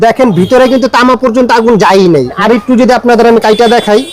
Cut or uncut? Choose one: cut